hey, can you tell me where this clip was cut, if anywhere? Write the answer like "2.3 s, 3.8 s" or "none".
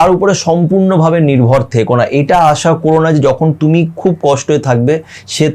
none